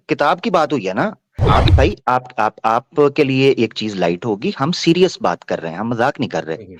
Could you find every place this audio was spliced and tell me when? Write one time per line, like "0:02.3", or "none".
0:01.7